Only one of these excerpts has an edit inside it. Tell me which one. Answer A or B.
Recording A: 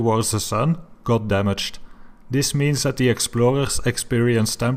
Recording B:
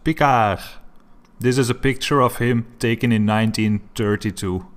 B